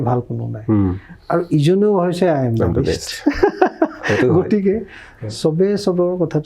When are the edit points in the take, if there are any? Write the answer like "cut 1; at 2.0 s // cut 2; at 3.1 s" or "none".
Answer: none